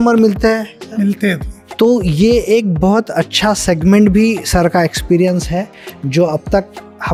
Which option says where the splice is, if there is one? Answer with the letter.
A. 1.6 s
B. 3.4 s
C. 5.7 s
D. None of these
D